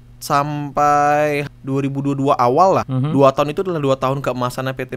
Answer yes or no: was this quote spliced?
yes